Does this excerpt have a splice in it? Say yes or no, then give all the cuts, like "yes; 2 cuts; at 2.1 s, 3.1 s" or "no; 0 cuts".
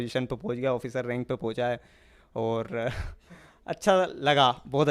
no; 0 cuts